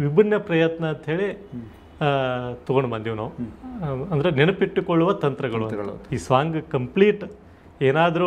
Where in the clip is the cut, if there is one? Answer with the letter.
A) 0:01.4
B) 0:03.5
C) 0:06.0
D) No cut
C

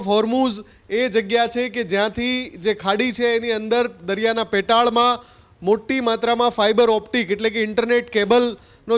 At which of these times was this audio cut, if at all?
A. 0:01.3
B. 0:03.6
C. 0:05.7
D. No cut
D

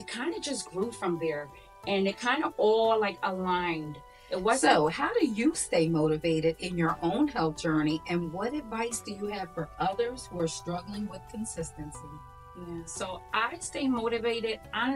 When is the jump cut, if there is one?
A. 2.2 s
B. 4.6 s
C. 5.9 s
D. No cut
B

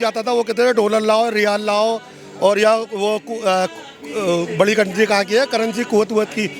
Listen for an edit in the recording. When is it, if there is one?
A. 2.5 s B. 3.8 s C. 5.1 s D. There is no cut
D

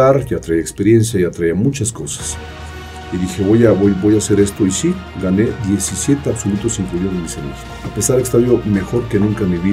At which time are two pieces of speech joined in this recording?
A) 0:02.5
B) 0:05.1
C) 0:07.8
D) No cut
C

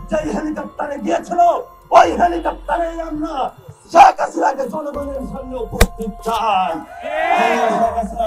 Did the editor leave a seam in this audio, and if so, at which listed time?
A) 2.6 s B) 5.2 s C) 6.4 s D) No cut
D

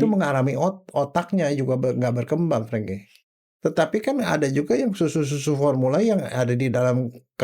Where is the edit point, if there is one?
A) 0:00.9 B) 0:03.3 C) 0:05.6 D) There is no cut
B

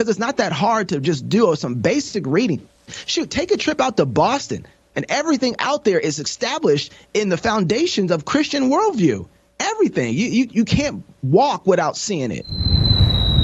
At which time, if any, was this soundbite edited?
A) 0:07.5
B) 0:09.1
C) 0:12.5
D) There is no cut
C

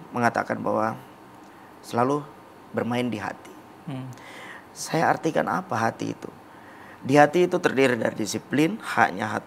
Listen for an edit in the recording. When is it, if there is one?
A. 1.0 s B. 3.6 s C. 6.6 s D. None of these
D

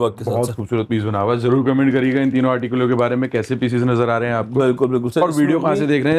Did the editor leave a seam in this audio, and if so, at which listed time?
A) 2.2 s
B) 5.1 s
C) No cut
C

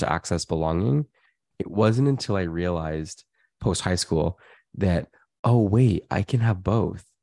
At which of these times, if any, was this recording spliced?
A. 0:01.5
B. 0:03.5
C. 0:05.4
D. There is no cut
A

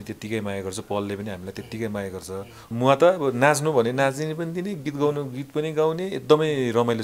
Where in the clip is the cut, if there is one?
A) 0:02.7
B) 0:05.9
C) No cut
A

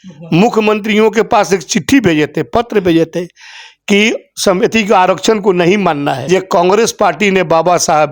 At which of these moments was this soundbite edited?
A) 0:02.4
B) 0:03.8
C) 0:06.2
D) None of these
C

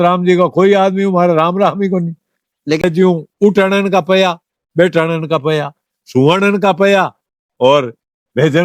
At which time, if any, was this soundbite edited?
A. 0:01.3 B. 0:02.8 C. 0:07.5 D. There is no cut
B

